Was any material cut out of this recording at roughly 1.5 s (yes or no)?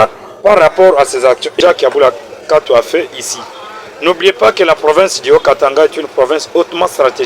yes